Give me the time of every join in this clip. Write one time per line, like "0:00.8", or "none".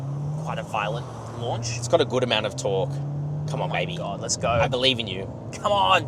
none